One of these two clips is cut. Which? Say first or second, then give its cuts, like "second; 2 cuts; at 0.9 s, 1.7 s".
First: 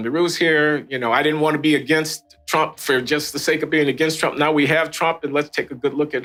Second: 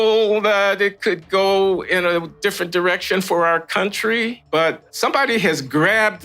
second; 1 cut; at 4.8 s